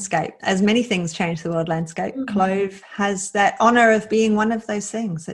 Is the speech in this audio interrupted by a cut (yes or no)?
no